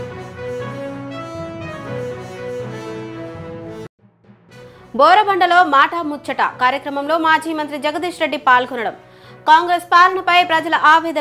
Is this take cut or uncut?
uncut